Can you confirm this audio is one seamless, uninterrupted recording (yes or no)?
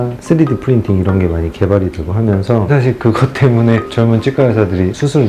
no